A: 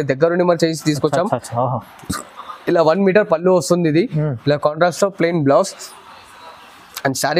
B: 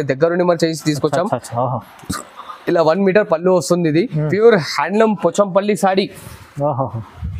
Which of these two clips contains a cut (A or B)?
B